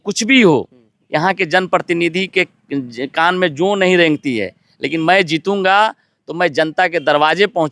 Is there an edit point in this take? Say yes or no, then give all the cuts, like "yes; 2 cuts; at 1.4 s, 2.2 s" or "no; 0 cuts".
no; 0 cuts